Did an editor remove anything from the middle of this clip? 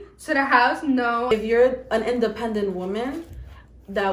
yes; 1 cut; at 1.3 s

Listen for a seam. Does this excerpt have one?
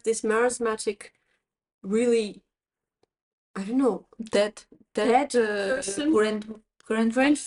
no; 0 cuts

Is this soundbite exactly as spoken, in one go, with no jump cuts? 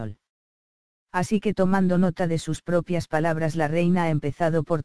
yes; 0 cuts

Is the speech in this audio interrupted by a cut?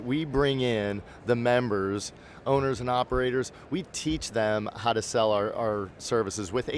no; 0 cuts

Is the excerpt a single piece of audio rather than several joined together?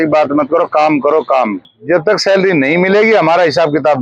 no; 1 cut; at 1.7 s

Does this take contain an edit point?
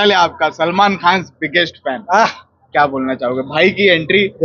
no; 0 cuts

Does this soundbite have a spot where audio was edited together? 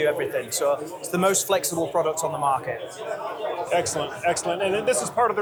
no; 0 cuts

